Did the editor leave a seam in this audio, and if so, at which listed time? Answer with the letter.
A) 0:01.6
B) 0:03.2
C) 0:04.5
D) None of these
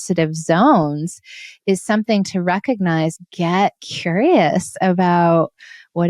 B